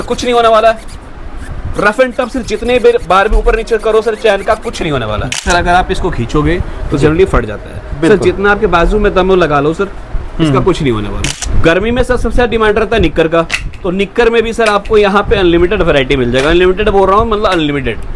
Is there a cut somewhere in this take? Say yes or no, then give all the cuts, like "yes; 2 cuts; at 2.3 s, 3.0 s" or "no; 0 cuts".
yes; 2 cuts; at 5.3 s, 11.3 s